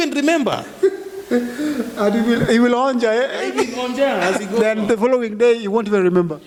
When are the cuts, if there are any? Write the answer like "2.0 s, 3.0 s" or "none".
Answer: none